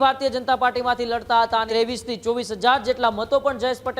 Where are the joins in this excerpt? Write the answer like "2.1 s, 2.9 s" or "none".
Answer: 1.7 s